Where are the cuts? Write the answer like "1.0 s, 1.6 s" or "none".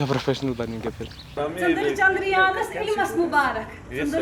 1.4 s